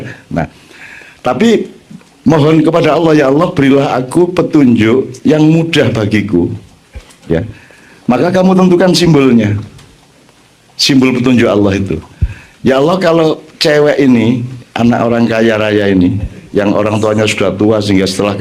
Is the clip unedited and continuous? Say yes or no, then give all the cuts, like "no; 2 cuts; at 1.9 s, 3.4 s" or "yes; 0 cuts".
yes; 0 cuts